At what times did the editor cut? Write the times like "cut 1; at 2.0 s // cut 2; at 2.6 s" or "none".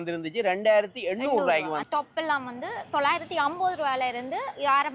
cut 1; at 1.8 s